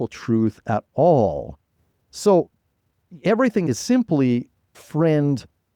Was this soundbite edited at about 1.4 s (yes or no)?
no